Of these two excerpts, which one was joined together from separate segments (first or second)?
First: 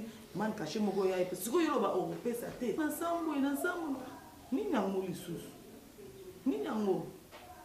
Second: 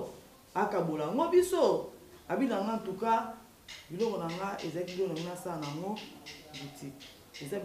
first